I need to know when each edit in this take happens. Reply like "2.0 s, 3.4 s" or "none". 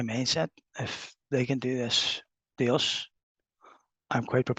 none